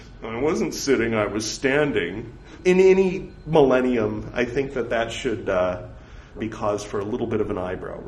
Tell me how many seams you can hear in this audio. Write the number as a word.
two